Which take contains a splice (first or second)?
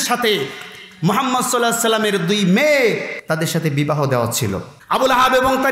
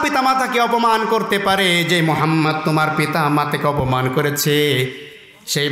first